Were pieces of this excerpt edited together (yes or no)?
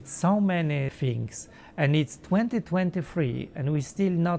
yes